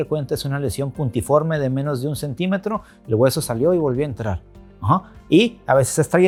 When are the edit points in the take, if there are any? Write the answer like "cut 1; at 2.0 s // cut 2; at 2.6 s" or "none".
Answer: none